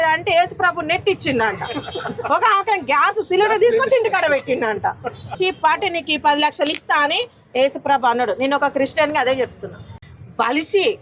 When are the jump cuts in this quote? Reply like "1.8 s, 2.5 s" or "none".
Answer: 5.3 s, 10.0 s